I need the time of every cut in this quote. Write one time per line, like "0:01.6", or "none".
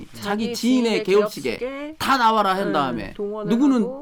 none